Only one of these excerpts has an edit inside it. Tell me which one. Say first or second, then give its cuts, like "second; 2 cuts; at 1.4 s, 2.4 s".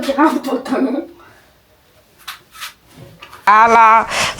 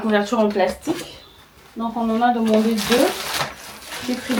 first; 1 cut; at 3.5 s